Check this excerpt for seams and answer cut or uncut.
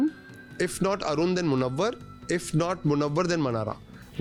uncut